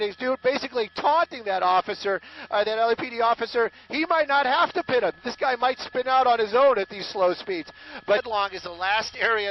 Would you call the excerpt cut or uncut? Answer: uncut